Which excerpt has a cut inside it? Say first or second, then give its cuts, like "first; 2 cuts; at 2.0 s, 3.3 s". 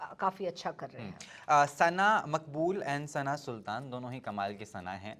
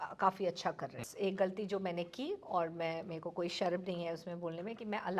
second; 1 cut; at 1.1 s